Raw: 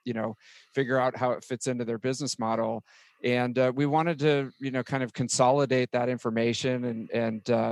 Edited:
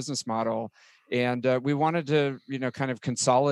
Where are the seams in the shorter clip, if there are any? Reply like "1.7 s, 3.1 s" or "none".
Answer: none